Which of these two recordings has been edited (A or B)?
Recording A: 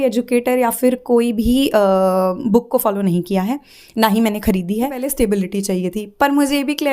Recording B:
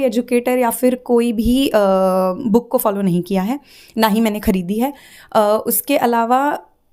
A